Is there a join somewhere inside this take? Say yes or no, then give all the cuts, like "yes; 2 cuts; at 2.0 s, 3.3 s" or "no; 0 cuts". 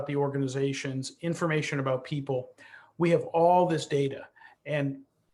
no; 0 cuts